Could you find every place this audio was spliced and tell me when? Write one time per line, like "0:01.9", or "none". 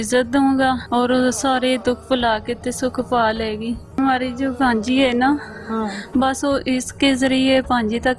0:00.8
0:04.0